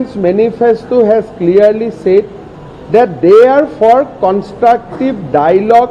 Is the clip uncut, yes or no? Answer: yes